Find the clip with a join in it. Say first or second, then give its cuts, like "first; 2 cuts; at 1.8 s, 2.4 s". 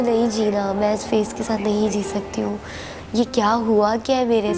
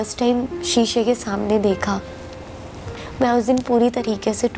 second; 1 cut; at 2.6 s